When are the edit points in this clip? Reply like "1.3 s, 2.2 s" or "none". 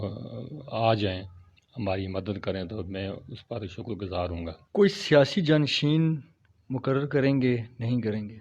4.6 s